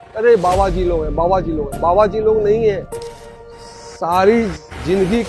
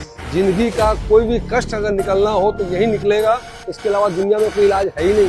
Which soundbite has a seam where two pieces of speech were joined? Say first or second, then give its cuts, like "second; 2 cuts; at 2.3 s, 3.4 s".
first; 1 cut; at 3.3 s